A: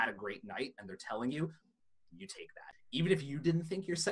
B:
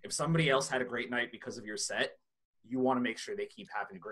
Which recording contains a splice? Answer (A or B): A